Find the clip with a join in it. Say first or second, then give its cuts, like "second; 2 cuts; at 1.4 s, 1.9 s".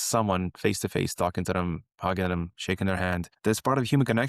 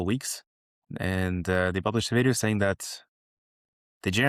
first; 1 cut; at 2.5 s